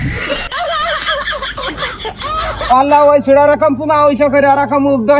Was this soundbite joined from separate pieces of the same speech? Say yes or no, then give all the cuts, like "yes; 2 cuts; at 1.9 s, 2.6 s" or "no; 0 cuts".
no; 0 cuts